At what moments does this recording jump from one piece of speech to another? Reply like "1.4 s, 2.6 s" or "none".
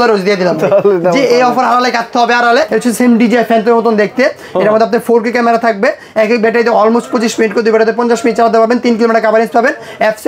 2.7 s